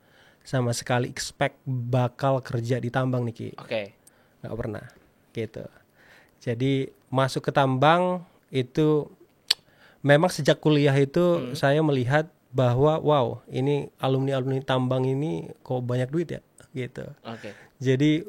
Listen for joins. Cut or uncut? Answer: uncut